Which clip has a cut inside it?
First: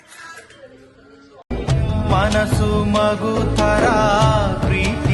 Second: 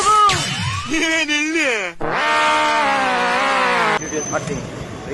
second; 1 cut; at 4.0 s

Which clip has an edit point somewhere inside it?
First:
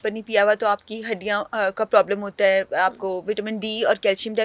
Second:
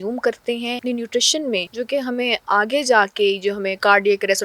second; 2 cuts; at 0.8 s, 1.7 s

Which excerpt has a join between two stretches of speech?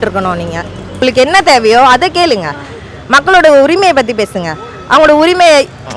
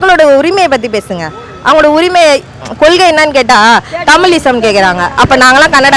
first; 1 cut; at 1.0 s

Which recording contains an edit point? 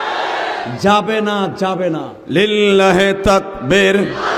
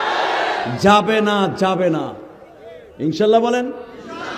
first; 1 cut; at 2.1 s

